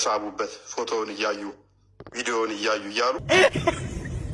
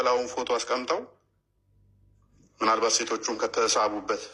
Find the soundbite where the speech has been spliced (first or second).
first